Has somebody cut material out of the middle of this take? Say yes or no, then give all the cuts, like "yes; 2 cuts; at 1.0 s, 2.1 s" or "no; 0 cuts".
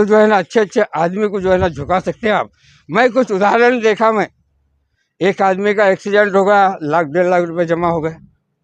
no; 0 cuts